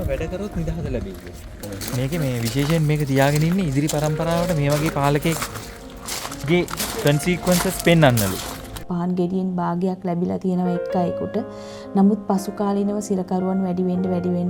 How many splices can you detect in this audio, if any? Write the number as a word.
two